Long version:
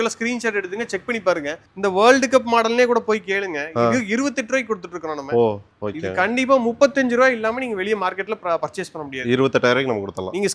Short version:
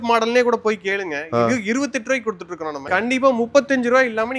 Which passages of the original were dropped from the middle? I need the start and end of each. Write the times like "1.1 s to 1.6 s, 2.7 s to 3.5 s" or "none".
5.2 s to 6.1 s